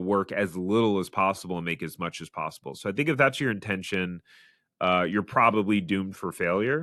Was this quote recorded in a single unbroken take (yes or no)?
yes